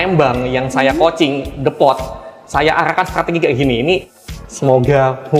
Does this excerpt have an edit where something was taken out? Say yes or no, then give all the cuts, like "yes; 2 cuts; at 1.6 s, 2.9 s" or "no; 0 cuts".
yes; 1 cut; at 4.2 s